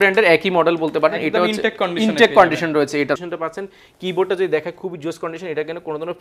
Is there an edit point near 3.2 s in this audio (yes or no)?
yes